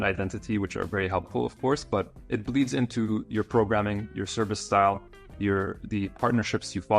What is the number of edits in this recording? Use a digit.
1